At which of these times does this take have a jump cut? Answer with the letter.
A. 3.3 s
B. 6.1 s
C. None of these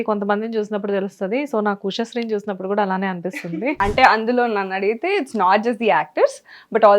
A